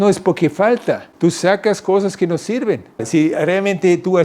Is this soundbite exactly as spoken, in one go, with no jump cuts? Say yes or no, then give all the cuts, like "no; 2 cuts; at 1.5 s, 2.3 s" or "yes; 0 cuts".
no; 2 cuts; at 1.1 s, 3.1 s